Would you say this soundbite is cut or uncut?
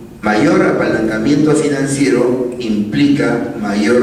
uncut